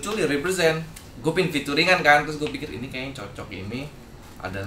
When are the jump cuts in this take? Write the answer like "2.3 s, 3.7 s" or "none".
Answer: 1.0 s